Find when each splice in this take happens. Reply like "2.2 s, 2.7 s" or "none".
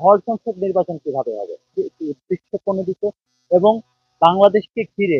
1.7 s